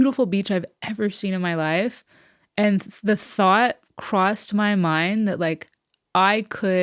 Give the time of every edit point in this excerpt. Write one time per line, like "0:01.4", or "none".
none